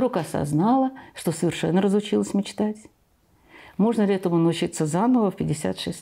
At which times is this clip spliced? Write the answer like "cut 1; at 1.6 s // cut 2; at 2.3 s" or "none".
none